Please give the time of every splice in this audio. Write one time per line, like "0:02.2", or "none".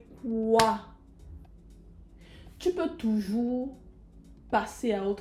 none